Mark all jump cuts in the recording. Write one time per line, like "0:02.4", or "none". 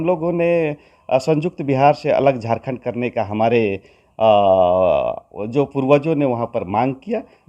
none

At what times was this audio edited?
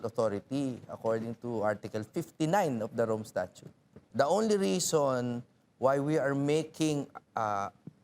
0:04.0

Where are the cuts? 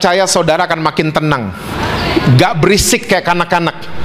none

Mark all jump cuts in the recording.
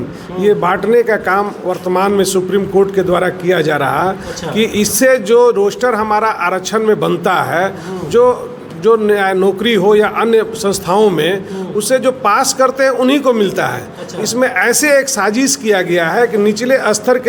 none

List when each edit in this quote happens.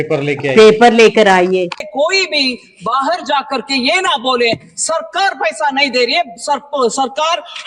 0:02.0

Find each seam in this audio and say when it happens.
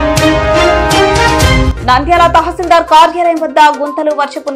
0:01.7

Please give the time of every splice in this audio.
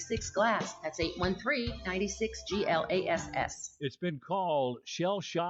none

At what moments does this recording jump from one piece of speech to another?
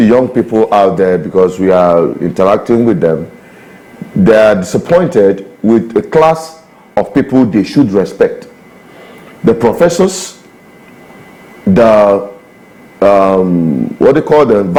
none

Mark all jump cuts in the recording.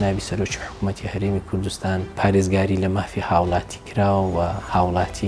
0:02.1

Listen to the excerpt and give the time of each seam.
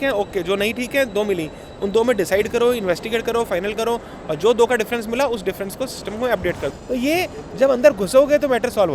0:06.7

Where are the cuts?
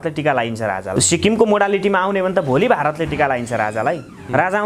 0:00.9

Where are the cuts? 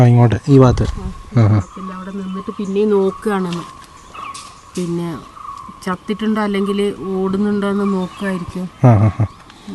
none

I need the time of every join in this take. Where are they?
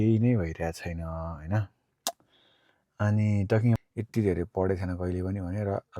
0:03.8

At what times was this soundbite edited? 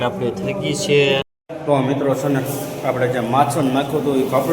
0:01.4

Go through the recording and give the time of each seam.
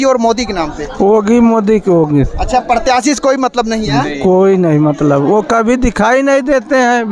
none

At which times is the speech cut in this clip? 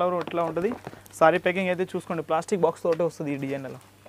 none

